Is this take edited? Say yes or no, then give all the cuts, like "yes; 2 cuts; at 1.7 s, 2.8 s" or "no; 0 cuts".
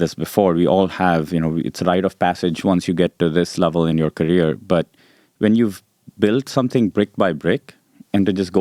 no; 0 cuts